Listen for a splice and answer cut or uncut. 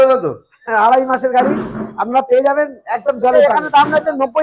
cut